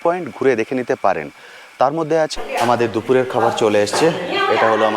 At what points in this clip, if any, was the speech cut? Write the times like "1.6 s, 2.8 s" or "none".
2.3 s